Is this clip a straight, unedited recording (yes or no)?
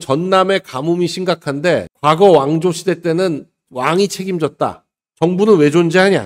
yes